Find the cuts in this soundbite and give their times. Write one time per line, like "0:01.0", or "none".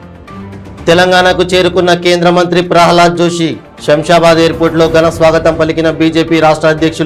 none